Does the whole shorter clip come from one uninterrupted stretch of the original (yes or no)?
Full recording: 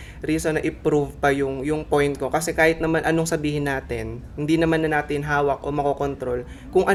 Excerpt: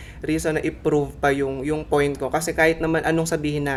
yes